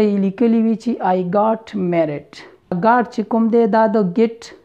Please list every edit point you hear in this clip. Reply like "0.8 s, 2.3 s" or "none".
2.8 s